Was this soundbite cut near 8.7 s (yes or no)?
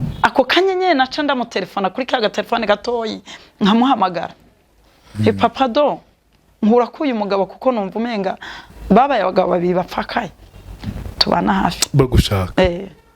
yes